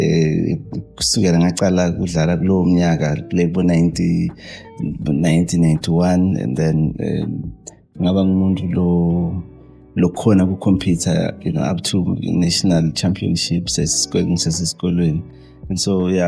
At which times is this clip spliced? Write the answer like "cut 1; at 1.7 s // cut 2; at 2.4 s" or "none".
none